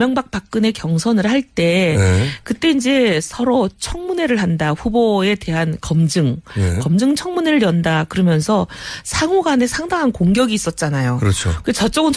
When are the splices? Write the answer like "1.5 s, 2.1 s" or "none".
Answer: 6.2 s